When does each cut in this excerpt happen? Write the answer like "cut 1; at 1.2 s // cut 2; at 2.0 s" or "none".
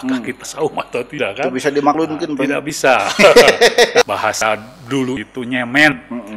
cut 1; at 3.7 s